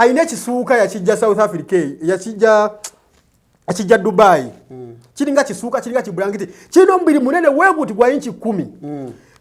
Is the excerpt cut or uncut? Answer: uncut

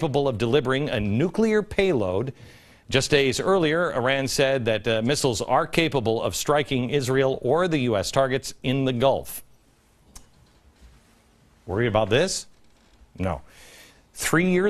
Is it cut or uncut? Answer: cut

